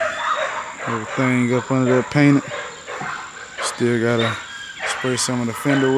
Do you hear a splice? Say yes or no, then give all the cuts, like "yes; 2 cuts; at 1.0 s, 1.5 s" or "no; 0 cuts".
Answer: no; 0 cuts